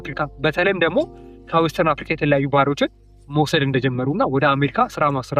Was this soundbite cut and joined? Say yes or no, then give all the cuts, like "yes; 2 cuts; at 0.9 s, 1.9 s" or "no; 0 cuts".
no; 0 cuts